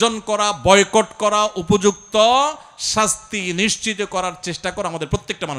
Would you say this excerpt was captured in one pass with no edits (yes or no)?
yes